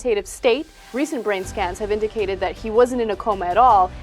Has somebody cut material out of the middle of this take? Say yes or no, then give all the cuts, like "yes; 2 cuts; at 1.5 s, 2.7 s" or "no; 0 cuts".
yes; 1 cut; at 1.0 s